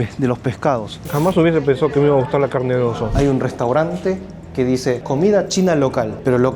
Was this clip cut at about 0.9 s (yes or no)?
yes